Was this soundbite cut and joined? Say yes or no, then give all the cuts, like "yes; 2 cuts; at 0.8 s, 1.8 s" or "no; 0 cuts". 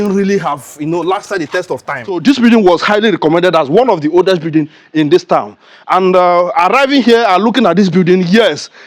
yes; 1 cut; at 2.2 s